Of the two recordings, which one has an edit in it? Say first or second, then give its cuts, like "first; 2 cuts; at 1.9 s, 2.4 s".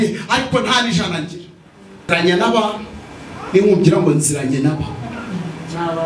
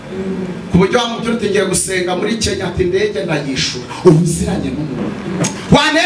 first; 1 cut; at 2.1 s